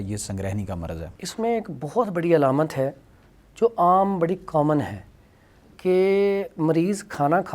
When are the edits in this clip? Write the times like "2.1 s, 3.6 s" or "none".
none